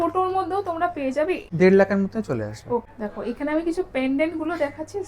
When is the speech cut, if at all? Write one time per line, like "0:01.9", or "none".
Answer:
0:01.5
0:02.9